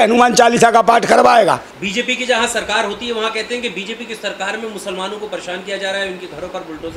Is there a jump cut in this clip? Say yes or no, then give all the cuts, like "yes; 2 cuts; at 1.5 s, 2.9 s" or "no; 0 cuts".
no; 0 cuts